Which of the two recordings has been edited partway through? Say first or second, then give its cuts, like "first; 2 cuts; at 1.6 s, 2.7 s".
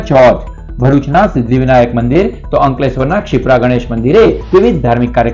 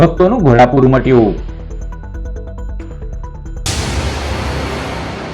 second; 1 cut; at 3.6 s